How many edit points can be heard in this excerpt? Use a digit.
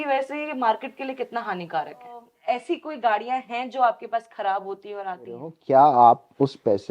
2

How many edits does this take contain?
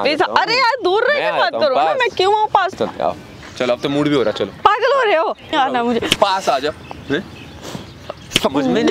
2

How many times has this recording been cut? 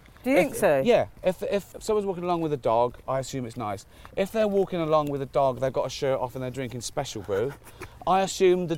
1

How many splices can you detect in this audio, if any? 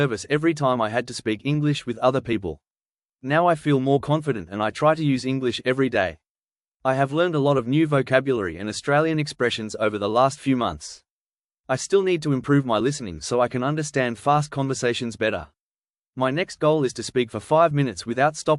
4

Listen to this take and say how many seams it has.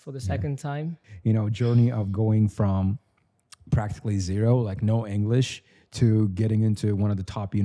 1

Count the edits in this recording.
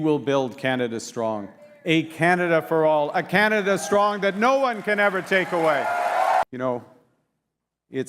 1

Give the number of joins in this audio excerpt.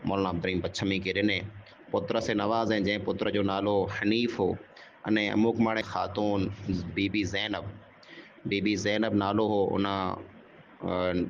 1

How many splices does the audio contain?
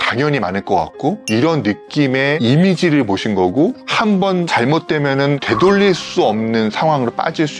4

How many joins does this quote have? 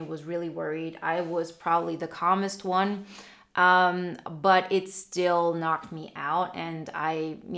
0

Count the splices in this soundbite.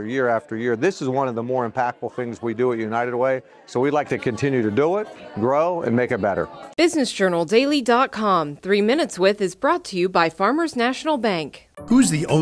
1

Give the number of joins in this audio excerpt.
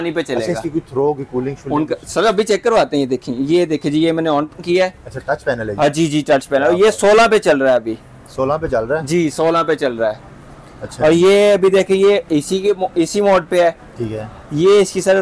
0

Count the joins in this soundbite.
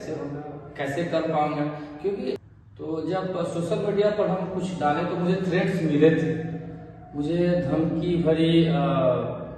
1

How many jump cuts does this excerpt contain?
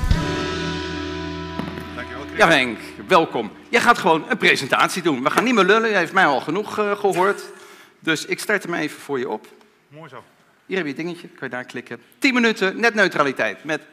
1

